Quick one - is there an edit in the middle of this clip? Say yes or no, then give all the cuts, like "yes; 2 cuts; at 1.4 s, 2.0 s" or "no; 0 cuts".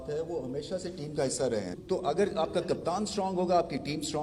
yes; 1 cut; at 1.8 s